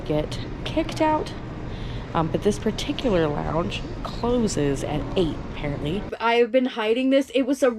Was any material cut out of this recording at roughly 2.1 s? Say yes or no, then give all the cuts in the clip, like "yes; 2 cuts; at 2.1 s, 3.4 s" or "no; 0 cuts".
no; 1 cut; at 6.1 s